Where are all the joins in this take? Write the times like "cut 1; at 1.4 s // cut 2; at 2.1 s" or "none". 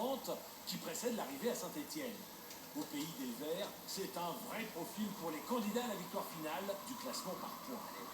cut 1; at 1.2 s